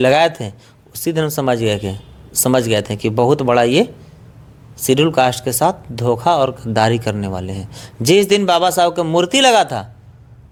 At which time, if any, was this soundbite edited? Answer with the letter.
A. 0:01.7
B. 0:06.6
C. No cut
C